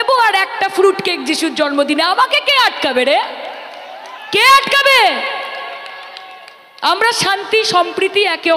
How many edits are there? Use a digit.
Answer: 0